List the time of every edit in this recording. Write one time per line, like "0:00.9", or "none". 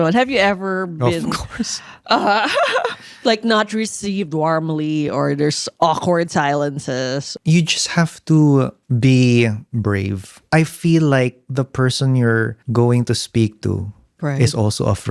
0:05.6
0:07.3
0:08.8
0:09.7
0:12.6